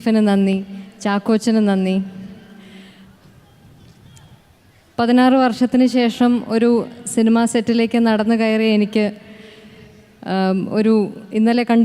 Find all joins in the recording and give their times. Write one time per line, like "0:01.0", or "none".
0:10.2